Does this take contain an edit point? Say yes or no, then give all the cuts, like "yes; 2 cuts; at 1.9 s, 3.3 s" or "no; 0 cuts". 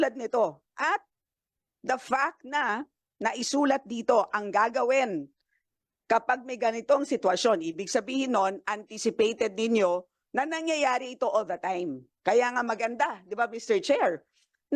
no; 0 cuts